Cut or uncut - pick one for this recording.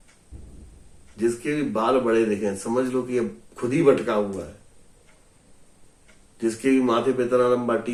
uncut